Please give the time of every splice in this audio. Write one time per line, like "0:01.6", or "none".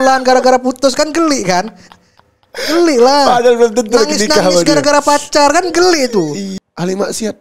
0:06.5